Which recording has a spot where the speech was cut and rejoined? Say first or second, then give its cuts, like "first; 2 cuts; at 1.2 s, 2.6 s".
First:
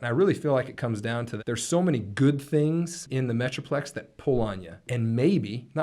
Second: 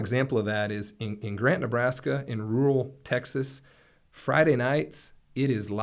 first; 3 cuts; at 1.3 s, 3.0 s, 4.9 s